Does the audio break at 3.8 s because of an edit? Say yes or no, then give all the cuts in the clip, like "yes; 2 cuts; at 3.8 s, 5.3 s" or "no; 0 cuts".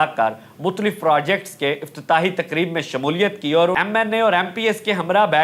yes; 1 cut; at 3.8 s